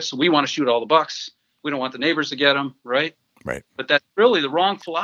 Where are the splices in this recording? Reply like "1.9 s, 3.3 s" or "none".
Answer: none